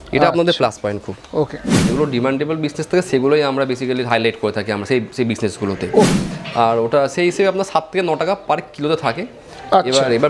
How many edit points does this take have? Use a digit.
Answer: 2